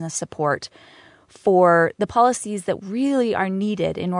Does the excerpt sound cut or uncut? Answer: uncut